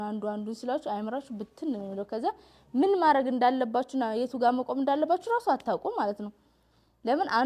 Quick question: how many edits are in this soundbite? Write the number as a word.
zero